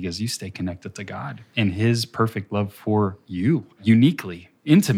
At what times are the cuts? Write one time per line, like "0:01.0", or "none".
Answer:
0:03.8